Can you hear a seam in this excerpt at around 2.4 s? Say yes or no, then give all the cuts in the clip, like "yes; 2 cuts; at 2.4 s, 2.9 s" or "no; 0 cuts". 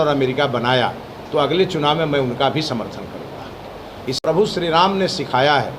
no; 1 cut; at 4.2 s